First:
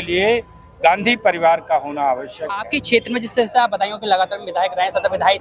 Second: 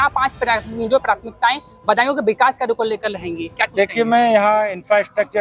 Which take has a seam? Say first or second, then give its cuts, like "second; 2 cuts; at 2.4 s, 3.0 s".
first; 1 cut; at 2.7 s